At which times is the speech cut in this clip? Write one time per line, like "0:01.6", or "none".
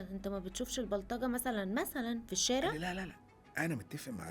0:02.8